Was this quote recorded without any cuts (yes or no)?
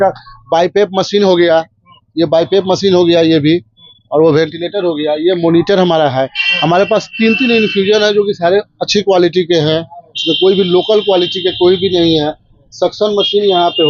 yes